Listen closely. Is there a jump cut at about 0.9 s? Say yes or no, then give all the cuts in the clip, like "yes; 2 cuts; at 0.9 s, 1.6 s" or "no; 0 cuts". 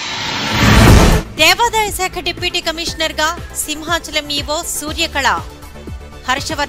no; 0 cuts